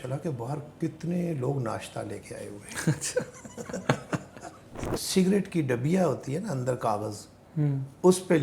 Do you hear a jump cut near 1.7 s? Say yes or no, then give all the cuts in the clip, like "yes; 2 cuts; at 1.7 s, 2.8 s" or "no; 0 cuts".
no; 1 cut; at 4.8 s